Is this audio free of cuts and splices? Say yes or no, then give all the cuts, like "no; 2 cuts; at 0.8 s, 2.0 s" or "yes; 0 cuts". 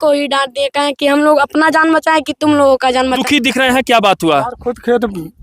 no; 1 cut; at 3.2 s